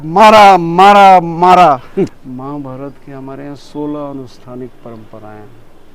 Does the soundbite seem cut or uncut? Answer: cut